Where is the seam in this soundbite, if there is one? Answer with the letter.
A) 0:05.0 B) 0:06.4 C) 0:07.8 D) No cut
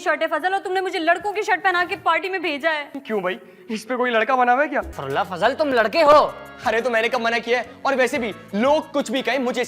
A